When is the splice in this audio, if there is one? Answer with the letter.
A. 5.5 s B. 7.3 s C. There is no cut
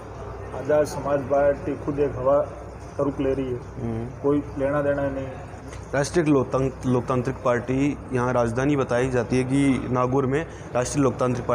A